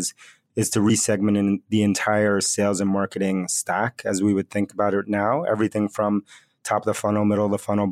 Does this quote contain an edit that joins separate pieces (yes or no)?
no